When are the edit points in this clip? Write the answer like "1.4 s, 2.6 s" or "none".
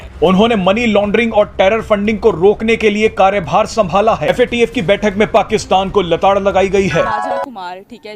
4.3 s, 7.2 s